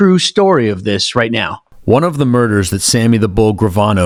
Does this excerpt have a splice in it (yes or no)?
no